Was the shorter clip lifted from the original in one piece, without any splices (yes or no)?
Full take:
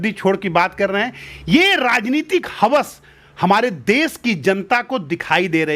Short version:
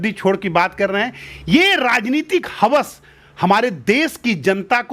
yes